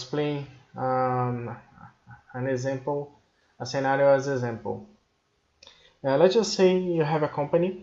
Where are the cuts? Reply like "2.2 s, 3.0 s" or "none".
none